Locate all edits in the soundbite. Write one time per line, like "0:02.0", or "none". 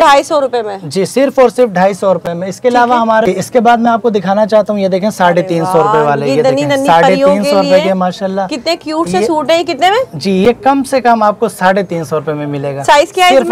none

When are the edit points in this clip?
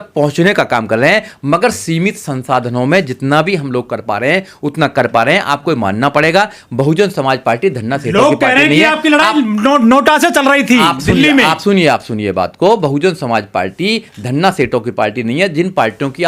none

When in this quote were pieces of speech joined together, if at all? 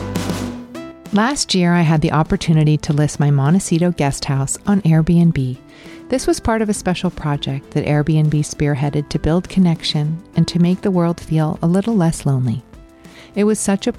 0:01.0

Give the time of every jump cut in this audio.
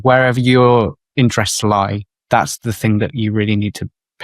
0:01.0
0:02.1

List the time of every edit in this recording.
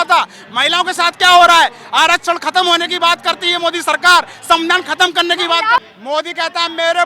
0:05.8

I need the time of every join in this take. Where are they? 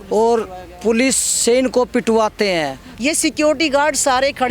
0:02.9

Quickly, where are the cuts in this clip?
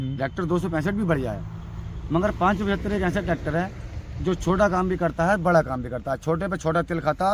none

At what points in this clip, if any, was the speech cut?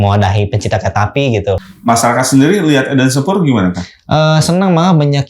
0:01.7

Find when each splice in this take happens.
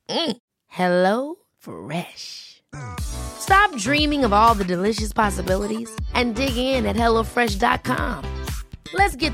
none

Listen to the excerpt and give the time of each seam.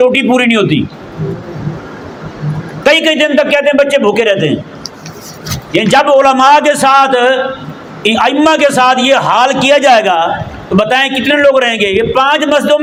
none

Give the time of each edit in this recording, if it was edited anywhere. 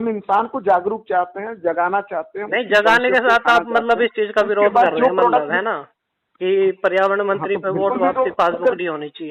none

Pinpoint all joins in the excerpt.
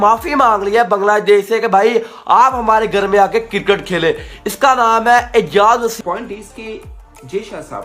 0:05.9

